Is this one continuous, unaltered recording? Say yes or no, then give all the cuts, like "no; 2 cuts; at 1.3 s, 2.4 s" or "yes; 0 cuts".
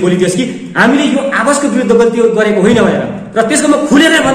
yes; 0 cuts